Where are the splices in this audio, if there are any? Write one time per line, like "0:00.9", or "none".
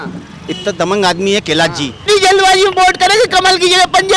0:02.0